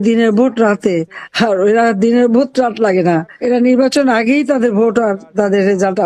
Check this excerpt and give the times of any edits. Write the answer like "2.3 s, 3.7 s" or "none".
3.3 s